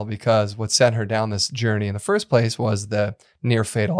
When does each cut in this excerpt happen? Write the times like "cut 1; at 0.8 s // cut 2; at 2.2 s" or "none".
none